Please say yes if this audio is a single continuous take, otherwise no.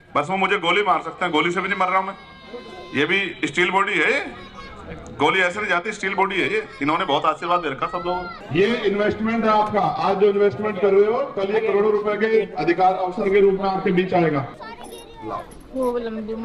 yes